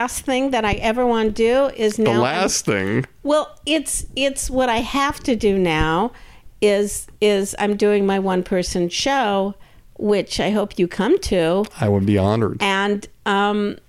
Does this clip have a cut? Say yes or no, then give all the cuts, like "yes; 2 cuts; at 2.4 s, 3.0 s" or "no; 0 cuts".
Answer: no; 0 cuts